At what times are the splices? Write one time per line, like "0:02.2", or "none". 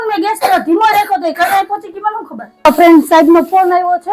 0:02.7